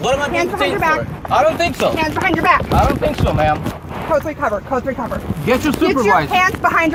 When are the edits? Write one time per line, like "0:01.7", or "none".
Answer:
none